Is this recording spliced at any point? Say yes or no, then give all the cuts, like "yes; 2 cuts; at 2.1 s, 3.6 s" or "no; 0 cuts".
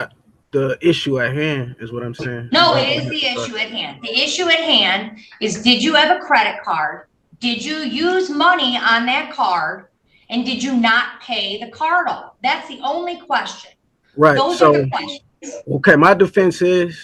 no; 0 cuts